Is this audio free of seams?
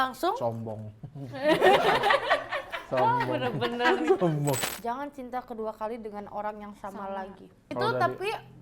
no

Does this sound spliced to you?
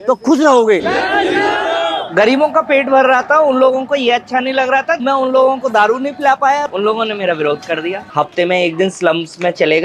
yes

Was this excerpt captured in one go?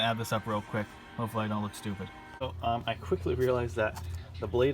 no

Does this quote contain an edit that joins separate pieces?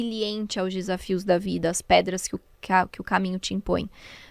no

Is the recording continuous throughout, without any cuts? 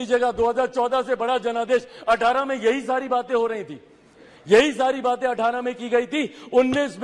yes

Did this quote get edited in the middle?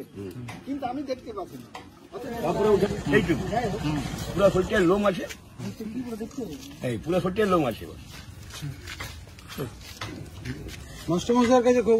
yes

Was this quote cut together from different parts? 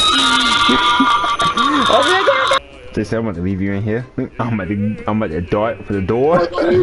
yes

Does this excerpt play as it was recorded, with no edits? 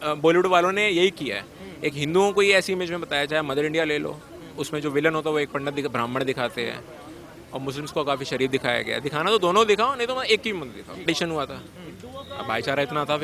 no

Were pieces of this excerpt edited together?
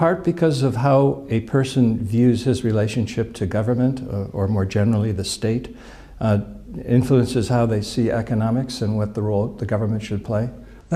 no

